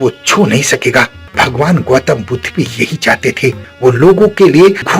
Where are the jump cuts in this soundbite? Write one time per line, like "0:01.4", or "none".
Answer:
0:01.2
0:03.7